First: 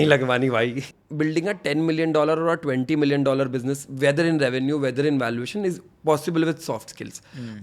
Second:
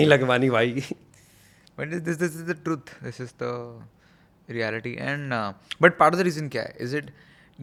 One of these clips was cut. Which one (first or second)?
first